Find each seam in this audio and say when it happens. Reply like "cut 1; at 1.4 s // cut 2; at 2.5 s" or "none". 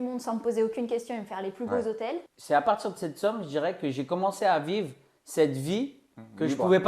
cut 1; at 2.3 s